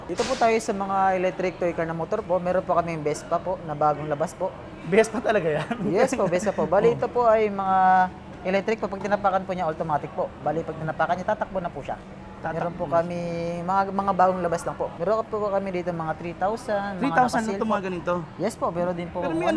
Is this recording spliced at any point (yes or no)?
no